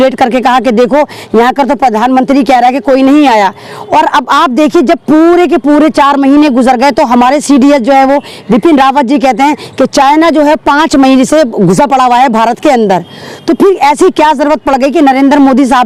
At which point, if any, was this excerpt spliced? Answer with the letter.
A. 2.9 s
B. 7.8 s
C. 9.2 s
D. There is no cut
D